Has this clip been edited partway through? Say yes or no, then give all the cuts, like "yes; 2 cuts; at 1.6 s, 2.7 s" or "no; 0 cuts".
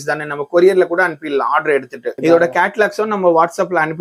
no; 0 cuts